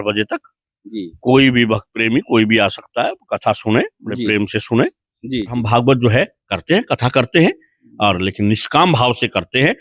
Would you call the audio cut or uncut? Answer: cut